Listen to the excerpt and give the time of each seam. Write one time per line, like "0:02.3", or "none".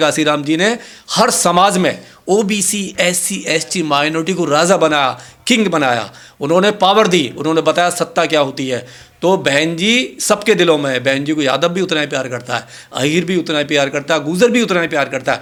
none